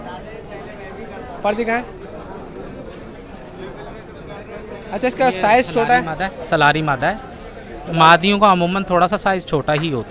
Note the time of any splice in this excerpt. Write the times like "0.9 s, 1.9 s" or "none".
none